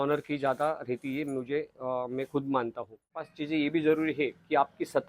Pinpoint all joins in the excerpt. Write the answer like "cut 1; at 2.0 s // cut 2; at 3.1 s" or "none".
cut 1; at 3.4 s